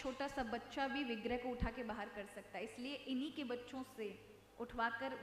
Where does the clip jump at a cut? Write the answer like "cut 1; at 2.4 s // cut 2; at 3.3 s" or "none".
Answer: none